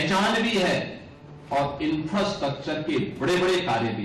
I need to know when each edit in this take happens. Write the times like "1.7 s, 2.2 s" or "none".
none